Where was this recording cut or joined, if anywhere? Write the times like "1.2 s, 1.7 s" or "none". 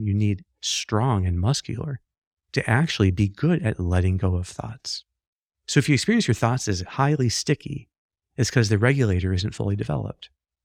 none